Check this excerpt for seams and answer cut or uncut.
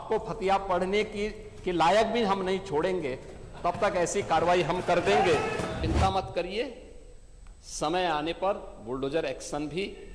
cut